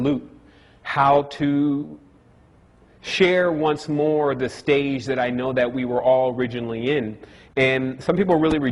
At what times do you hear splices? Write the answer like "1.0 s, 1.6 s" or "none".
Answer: 5.4 s